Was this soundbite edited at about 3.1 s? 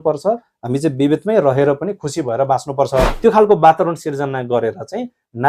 yes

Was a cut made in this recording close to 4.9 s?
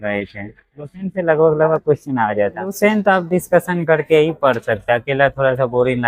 no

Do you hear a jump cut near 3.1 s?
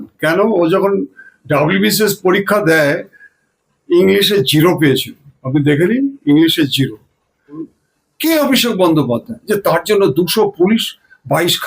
no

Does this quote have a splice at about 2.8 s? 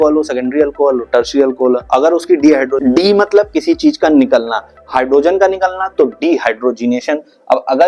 yes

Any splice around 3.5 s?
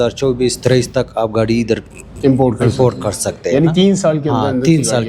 no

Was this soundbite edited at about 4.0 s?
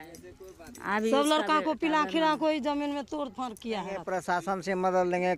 yes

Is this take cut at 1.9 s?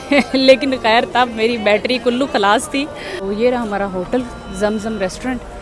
no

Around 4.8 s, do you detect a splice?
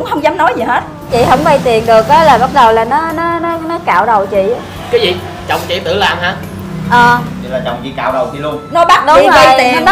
no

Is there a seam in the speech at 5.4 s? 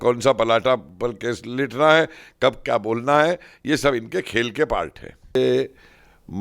yes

